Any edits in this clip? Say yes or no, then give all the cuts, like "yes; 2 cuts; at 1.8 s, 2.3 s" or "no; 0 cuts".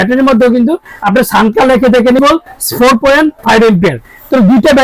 yes; 1 cut; at 2.2 s